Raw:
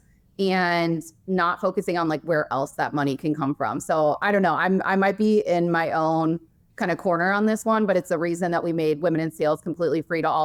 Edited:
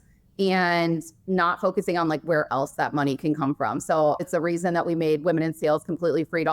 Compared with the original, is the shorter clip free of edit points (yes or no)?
no